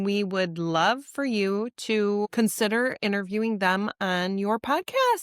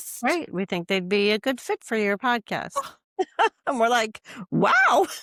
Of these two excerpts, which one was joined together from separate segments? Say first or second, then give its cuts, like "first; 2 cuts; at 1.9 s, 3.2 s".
first; 1 cut; at 2.3 s